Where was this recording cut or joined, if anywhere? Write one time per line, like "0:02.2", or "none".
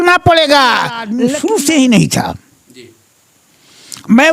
0:01.1